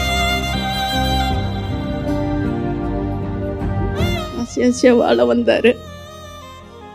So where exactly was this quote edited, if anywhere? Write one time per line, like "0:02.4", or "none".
0:04.3